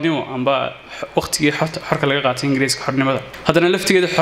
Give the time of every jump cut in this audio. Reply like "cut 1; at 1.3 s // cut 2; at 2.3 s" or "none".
cut 1; at 3.3 s

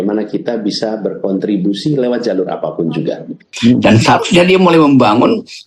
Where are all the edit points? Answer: cut 1; at 3.5 s

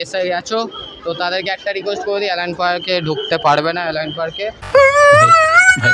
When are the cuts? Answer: none

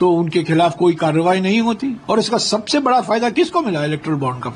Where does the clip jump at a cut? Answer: cut 1; at 2.0 s

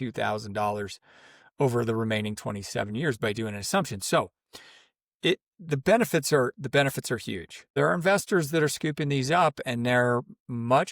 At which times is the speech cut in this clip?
cut 1; at 7.8 s

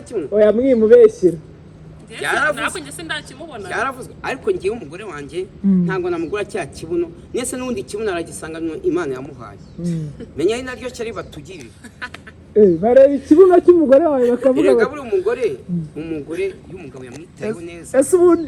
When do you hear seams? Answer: none

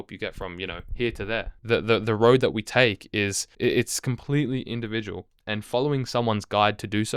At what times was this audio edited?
cut 1; at 1.0 s // cut 2; at 3.4 s

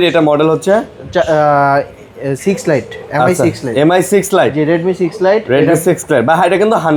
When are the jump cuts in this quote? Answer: none

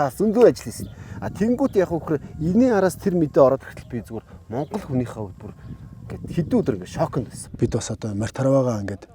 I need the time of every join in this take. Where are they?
cut 1; at 7.4 s

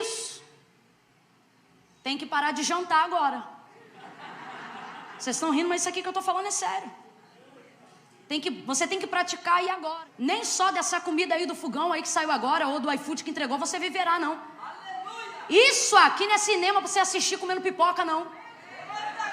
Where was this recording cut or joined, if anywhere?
cut 1; at 9.8 s

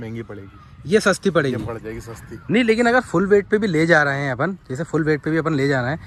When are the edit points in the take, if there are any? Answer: none

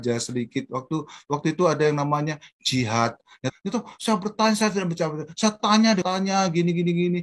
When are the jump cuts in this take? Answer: cut 1; at 3.5 s // cut 2; at 6.0 s

